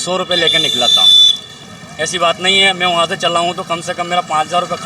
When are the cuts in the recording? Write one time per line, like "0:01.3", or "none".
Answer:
0:01.7